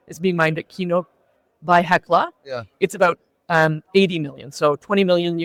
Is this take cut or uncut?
uncut